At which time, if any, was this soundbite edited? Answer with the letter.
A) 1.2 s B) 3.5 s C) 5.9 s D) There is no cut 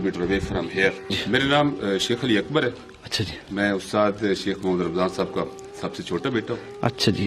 A